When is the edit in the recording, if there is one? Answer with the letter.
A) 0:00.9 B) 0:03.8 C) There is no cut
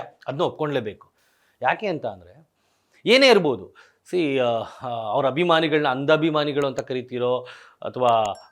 C